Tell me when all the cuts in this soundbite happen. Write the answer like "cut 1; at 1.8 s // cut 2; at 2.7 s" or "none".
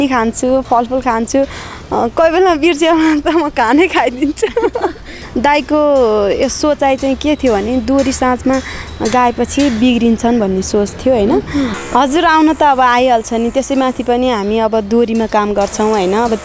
cut 1; at 5.2 s // cut 2; at 11.8 s